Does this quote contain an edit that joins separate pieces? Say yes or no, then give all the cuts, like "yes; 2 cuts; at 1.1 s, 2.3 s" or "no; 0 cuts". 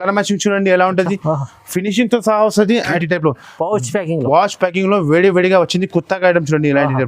yes; 1 cut; at 3.0 s